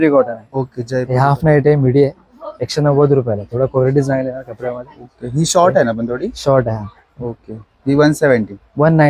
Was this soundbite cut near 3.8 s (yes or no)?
no